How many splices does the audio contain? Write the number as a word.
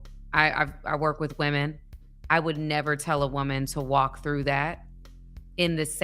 one